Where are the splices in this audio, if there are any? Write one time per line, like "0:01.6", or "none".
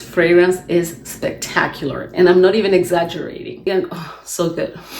0:03.7